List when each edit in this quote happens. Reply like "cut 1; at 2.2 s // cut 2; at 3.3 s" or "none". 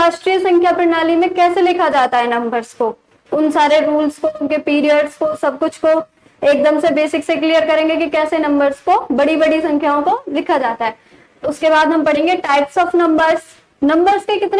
cut 1; at 3.2 s